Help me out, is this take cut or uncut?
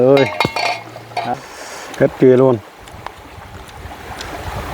cut